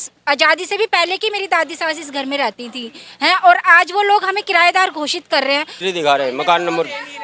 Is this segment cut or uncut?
cut